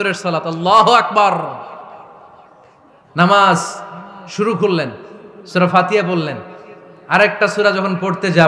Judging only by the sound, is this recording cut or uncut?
uncut